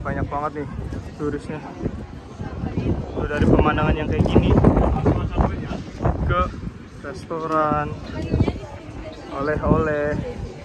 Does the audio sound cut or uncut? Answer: uncut